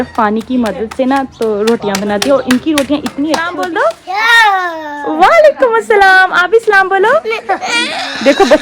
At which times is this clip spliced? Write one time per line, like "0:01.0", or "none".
0:03.6

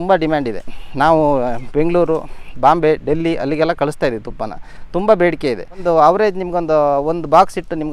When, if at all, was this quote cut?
none

